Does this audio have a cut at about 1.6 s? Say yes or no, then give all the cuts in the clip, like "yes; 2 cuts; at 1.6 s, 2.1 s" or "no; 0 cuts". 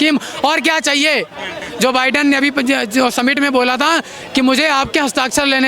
yes; 1 cut; at 1.6 s